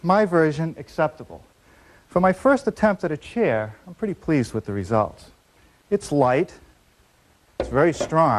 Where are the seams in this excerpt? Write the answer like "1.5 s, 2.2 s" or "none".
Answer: none